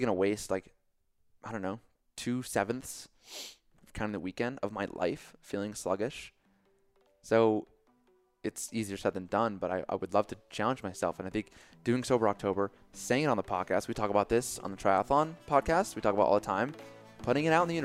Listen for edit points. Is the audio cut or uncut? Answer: uncut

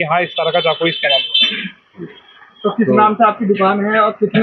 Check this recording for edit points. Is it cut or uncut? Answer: uncut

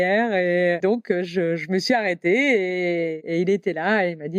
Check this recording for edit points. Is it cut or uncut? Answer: cut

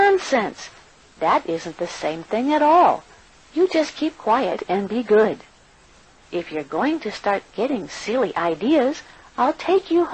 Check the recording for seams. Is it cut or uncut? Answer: cut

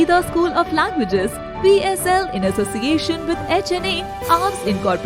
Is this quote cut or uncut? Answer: uncut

